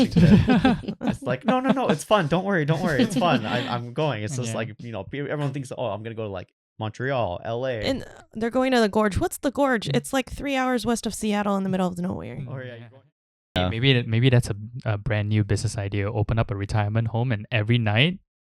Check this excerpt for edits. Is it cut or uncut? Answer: cut